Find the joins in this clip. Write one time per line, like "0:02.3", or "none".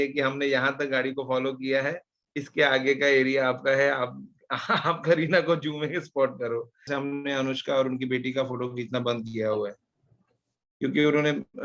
0:06.9